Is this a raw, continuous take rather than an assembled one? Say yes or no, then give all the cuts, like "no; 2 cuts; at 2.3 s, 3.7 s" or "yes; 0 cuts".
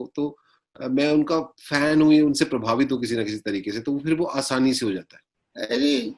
no; 1 cut; at 5.0 s